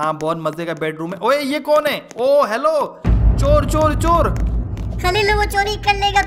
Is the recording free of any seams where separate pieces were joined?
yes; 0 cuts

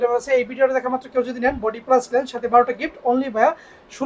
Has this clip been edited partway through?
no; 0 cuts

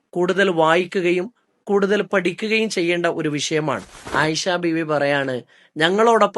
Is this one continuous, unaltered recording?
no; 1 cut; at 4.0 s

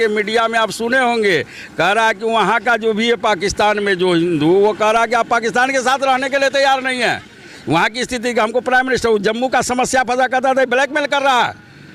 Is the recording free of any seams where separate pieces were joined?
yes; 0 cuts

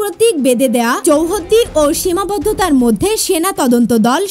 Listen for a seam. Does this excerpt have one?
yes; 1 cut; at 1.0 s

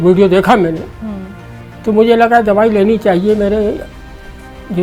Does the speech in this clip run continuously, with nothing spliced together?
yes; 0 cuts

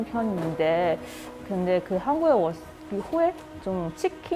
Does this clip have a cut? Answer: no; 0 cuts

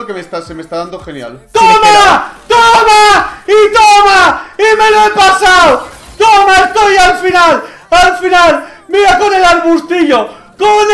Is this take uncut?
no; 1 cut; at 1.5 s

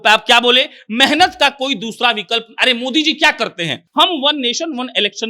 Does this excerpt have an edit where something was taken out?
yes; 1 cut; at 3.8 s

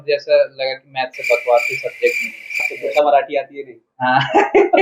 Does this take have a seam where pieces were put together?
yes; 1 cut; at 2.6 s

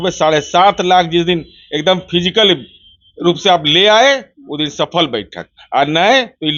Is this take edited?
no; 0 cuts

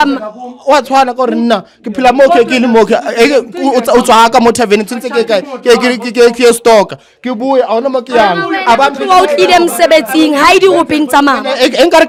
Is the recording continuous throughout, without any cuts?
yes; 0 cuts

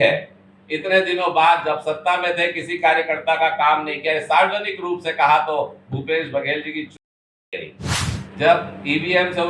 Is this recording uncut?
yes; 0 cuts

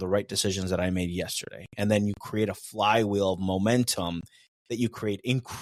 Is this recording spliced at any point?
no; 0 cuts

